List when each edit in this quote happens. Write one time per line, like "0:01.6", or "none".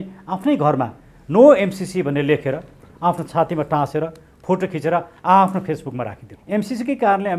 0:06.3